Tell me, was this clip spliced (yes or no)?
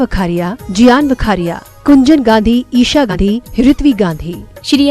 yes